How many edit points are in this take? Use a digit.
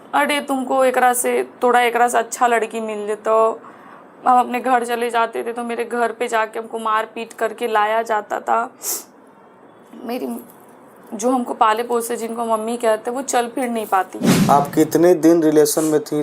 1